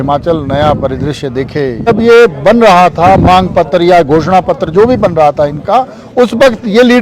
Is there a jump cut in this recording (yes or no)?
yes